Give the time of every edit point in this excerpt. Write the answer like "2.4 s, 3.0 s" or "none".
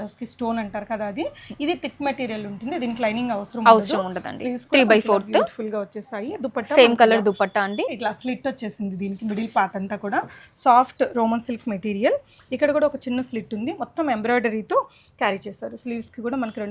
7.9 s